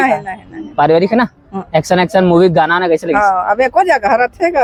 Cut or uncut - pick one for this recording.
uncut